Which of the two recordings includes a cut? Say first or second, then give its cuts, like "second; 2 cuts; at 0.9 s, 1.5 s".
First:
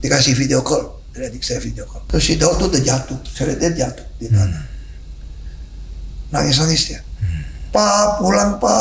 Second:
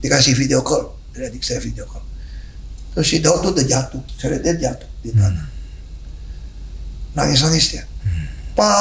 first; 1 cut; at 1.9 s